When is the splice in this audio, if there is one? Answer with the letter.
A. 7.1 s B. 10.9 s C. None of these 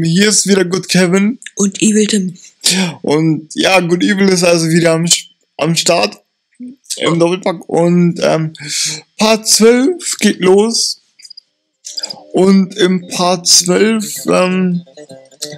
B